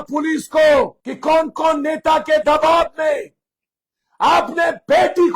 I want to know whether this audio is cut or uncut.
cut